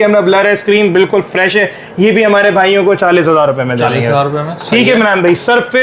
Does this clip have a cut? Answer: no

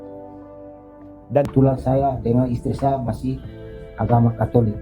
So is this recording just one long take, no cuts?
no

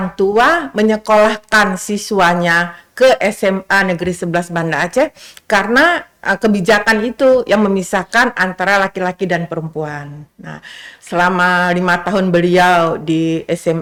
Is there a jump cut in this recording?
no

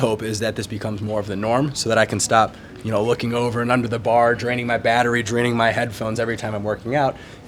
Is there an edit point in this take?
no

